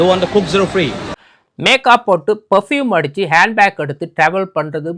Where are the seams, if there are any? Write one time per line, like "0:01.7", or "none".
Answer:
0:01.3